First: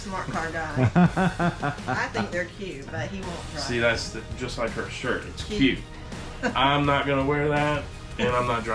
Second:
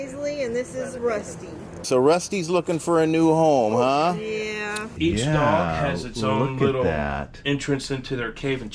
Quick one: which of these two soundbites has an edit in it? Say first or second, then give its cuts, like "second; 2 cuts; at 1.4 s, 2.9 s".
second; 2 cuts; at 1.8 s, 4.9 s